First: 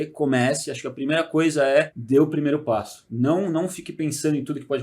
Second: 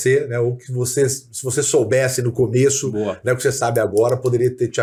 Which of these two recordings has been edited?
first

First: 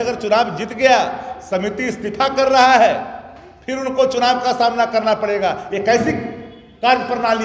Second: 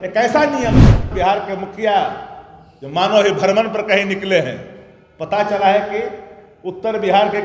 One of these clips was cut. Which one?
second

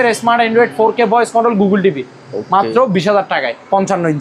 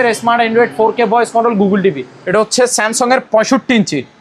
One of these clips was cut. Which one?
second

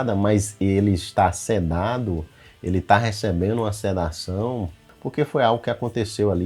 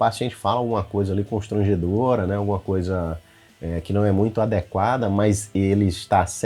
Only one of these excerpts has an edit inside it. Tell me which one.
first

